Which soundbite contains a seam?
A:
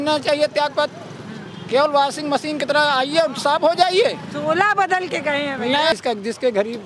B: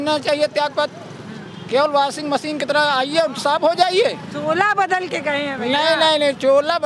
A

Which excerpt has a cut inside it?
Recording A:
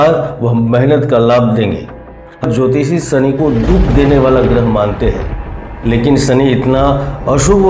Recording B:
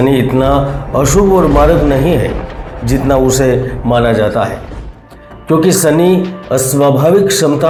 A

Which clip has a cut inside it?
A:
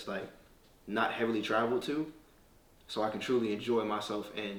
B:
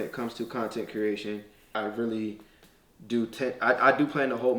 B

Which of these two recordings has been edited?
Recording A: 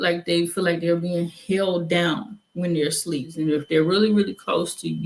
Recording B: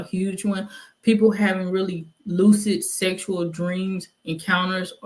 A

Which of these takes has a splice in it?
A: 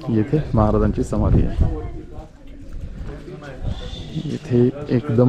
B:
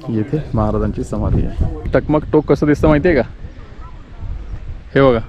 B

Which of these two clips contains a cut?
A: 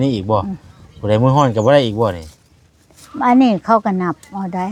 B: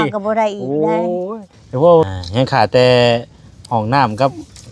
B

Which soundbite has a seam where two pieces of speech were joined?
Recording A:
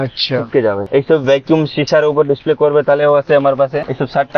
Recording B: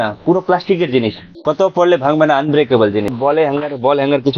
B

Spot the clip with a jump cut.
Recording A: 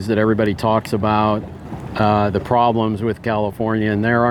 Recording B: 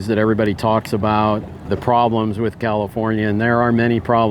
B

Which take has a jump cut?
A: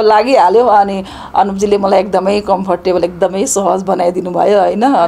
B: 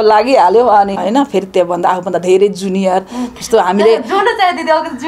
B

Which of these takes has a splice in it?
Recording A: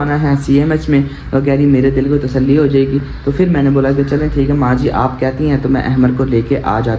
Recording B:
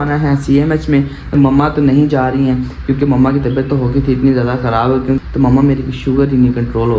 B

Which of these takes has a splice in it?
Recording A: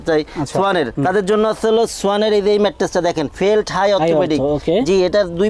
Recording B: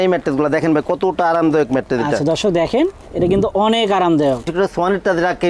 B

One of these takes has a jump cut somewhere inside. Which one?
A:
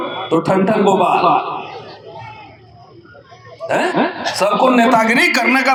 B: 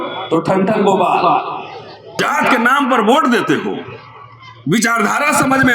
B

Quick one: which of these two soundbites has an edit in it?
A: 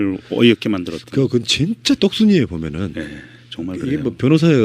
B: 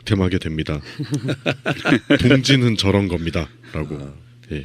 A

